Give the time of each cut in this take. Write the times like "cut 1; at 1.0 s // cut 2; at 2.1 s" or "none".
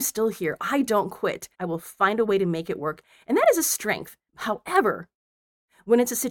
cut 1; at 1.5 s // cut 2; at 4.2 s